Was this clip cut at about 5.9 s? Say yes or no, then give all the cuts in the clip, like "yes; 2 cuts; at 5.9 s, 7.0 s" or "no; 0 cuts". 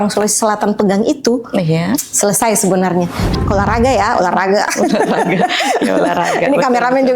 no; 1 cut; at 3.3 s